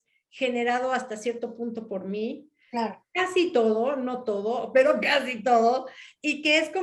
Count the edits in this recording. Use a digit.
0